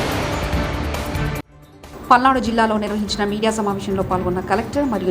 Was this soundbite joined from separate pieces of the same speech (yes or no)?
yes